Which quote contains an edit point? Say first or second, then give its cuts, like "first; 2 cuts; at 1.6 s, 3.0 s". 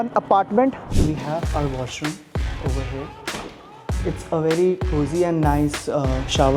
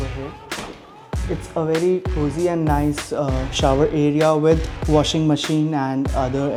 first; 1 cut; at 0.9 s